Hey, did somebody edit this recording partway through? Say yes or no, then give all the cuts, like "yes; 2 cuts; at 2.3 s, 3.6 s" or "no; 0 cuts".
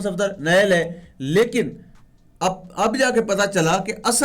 no; 0 cuts